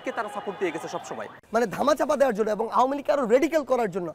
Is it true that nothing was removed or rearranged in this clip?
no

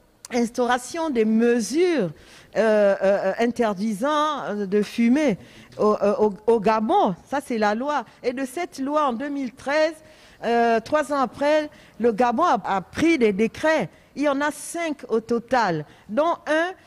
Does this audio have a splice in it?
yes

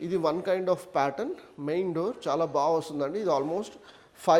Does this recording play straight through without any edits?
yes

